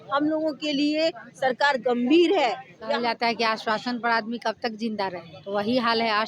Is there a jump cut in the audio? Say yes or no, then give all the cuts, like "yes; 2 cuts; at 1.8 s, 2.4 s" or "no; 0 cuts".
yes; 2 cuts; at 2.9 s, 5.3 s